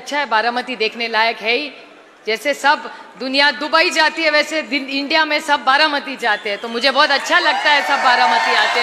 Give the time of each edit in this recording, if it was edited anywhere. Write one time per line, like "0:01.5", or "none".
none